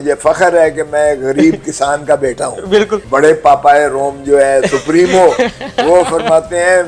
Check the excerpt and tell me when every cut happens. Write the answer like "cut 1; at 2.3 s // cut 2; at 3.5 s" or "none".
cut 1; at 3.0 s